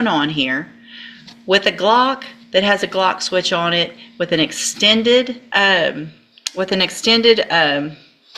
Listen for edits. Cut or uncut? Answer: cut